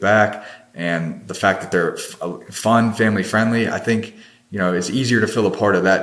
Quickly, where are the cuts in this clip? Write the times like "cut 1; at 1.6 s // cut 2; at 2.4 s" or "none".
none

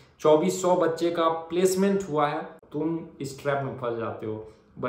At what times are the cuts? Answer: cut 1; at 2.5 s

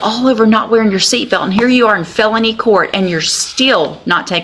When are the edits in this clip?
none

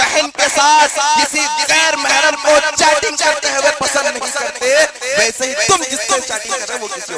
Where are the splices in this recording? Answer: none

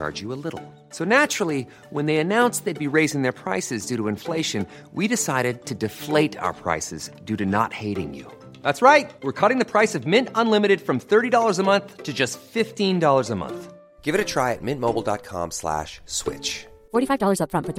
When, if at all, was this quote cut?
none

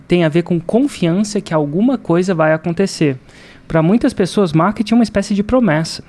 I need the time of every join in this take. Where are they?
none

